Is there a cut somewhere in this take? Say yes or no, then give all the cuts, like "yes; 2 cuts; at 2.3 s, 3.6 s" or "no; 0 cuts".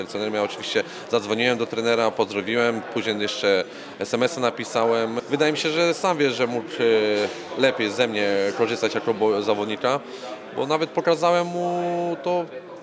yes; 1 cut; at 5.1 s